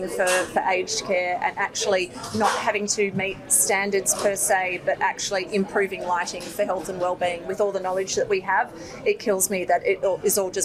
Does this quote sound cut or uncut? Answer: uncut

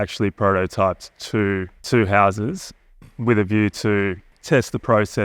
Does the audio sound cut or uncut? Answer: cut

